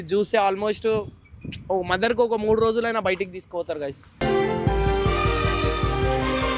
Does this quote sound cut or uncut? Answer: uncut